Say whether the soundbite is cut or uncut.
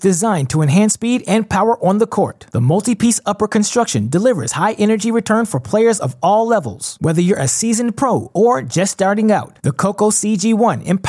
uncut